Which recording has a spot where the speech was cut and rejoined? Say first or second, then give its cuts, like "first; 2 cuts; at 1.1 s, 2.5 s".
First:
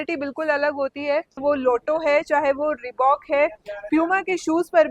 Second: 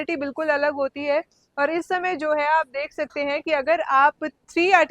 first; 1 cut; at 1.4 s